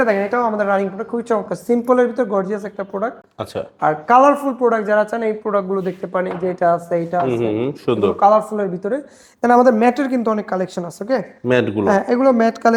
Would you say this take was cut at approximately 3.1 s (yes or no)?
no